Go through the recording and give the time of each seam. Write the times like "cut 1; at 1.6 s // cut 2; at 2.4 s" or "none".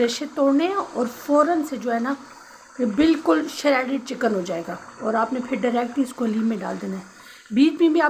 none